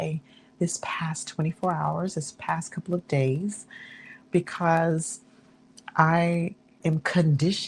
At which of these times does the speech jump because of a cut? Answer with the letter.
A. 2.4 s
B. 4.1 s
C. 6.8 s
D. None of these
C